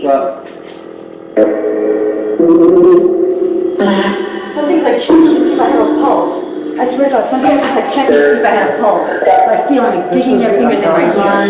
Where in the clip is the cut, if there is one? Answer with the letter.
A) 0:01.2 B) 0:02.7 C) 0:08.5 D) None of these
D